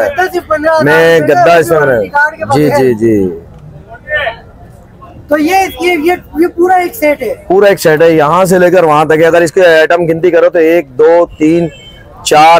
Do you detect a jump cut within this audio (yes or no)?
no